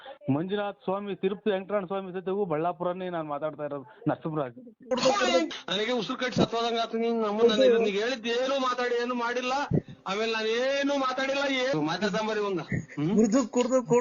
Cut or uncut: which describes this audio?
cut